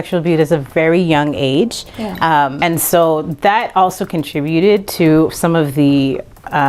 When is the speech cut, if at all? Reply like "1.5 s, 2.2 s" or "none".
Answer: 2.6 s